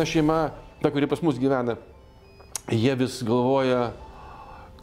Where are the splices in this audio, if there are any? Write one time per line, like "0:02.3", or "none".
none